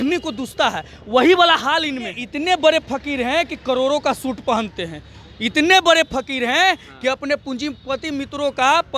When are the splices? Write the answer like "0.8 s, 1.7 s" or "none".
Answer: 2.3 s